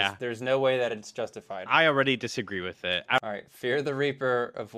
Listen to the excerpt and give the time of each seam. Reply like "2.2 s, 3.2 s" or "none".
3.2 s